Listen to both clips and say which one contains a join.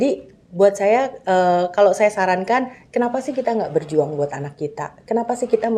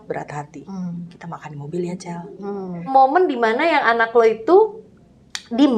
second; 1 cut; at 2.9 s

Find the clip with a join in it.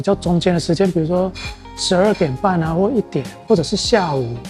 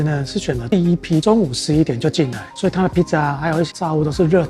second; 2 cuts; at 1.2 s, 3.7 s

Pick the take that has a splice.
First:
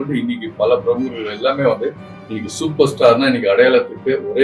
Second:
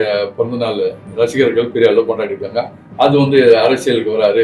second; 1 cut; at 1.0 s

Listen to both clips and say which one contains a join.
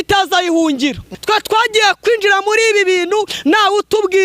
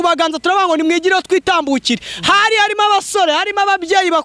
first; 1 cut; at 1.1 s

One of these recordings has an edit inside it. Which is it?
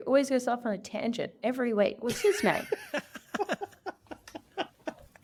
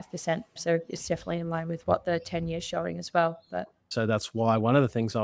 second; 1 cut; at 4.0 s

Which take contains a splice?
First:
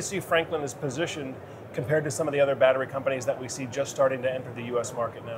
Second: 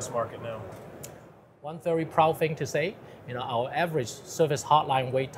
second; 1 cut; at 1.8 s

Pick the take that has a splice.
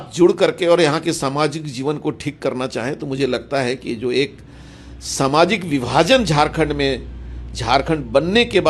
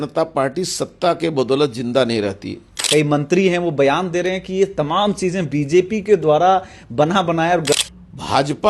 second; 2 cuts; at 2.7 s, 7.7 s

